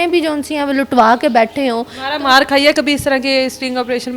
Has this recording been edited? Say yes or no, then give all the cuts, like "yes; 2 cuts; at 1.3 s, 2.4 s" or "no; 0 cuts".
no; 0 cuts